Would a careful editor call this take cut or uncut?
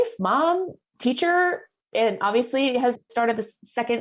cut